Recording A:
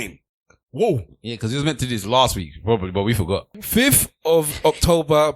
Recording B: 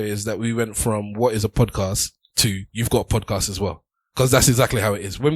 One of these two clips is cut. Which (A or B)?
A